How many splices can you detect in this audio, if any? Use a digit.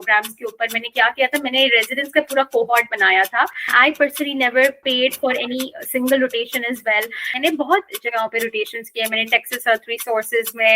2